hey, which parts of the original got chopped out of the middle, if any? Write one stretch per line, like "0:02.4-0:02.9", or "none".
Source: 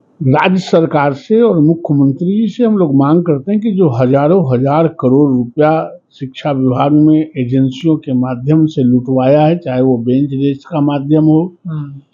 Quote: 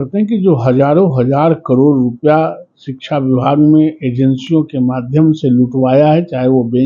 none